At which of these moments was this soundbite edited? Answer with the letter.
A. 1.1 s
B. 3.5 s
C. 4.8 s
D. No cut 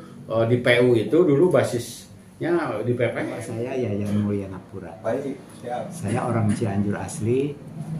B